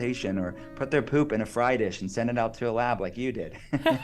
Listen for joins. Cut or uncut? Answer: uncut